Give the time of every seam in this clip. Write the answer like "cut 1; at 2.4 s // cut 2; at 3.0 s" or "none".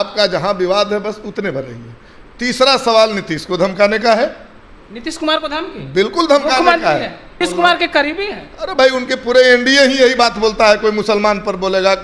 cut 1; at 7.3 s